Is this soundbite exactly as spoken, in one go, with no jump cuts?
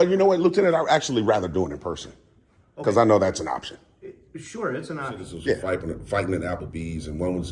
no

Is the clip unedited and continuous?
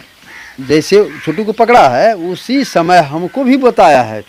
yes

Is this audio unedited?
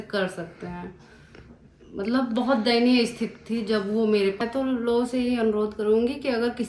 no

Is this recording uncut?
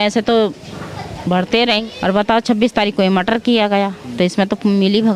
no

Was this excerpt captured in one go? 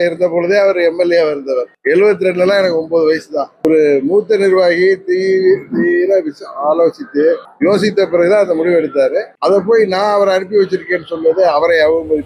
no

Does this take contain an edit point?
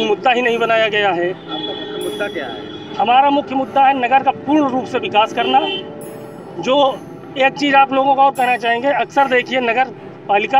no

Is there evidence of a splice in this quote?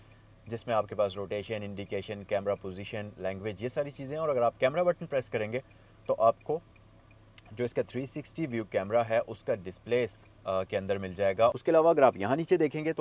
yes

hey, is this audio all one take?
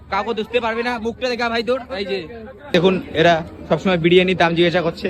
no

